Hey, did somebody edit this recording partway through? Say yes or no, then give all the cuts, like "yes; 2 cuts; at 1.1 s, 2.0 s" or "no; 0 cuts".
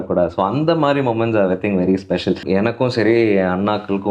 yes; 1 cut; at 2.4 s